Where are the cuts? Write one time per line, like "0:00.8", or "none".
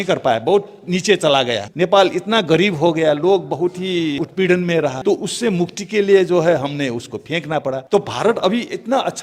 0:01.6
0:04.2
0:05.0
0:07.8